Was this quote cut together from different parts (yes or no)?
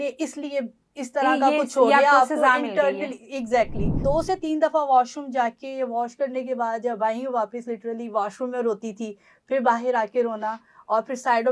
yes